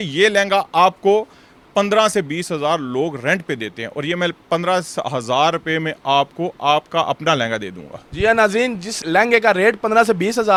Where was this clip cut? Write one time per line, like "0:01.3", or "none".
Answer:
none